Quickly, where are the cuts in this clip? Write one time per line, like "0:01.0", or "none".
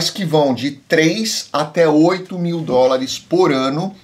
none